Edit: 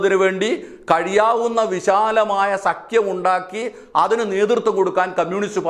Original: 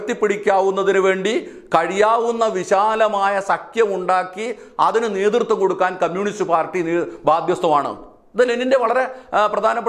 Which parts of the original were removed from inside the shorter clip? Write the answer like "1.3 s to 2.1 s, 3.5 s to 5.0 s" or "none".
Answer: none